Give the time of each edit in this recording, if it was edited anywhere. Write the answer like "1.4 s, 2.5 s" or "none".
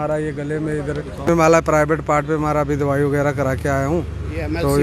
1.3 s